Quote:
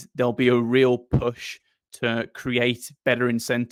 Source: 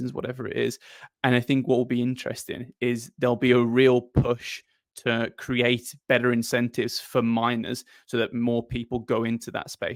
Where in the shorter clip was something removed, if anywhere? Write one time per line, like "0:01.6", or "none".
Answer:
none